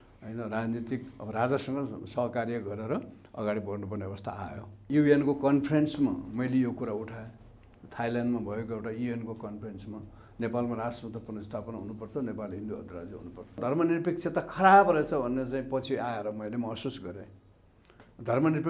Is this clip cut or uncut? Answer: cut